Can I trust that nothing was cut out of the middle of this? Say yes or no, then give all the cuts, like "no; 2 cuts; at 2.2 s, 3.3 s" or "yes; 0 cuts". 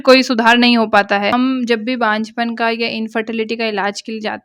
no; 1 cut; at 1.3 s